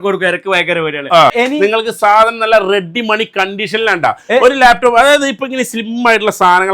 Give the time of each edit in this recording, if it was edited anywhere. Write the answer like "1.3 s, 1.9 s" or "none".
1.3 s